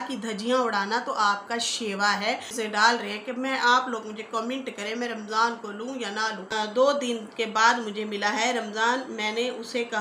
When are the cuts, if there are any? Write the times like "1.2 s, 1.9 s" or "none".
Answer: 2.5 s, 6.5 s